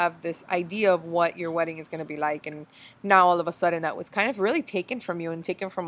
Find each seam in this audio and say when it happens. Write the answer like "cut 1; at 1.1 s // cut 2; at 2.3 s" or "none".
none